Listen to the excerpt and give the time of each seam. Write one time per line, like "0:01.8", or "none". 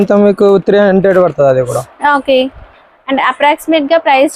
none